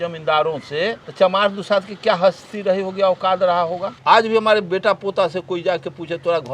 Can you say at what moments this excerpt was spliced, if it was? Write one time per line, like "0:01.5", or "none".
0:01.0
0:03.9